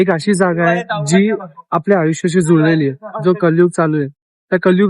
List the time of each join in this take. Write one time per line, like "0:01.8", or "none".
0:03.1